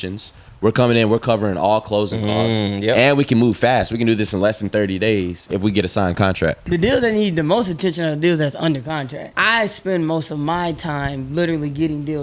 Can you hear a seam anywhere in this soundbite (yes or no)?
yes